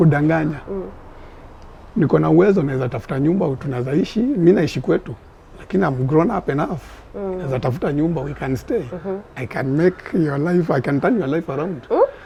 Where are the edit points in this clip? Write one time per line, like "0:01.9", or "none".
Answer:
none

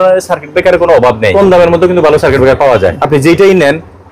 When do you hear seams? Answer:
0:01.3
0:03.0

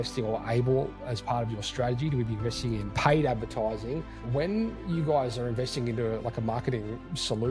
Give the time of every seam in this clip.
0:01.1
0:02.9
0:04.2

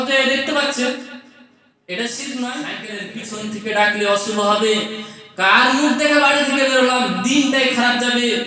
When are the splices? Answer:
0:03.1

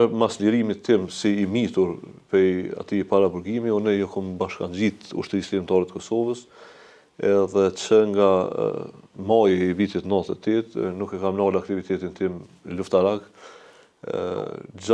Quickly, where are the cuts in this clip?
none

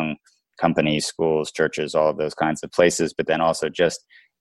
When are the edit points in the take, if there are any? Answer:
none

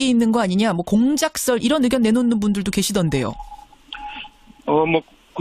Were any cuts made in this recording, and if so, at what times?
0:02.7

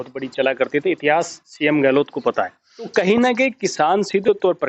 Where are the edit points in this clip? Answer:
0:02.9

